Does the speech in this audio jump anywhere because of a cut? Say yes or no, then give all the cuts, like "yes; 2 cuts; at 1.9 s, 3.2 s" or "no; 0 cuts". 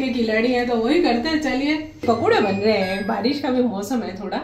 yes; 1 cut; at 2.0 s